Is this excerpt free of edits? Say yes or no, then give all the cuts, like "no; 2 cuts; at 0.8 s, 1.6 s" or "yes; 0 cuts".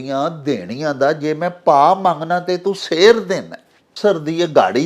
no; 1 cut; at 3.9 s